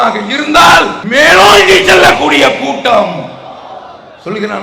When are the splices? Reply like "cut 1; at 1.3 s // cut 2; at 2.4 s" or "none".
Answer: cut 1; at 1.0 s